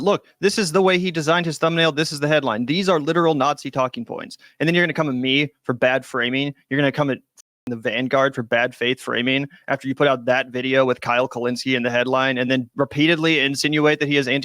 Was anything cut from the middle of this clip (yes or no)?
yes